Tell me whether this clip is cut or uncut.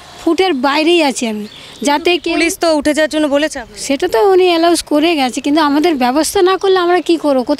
uncut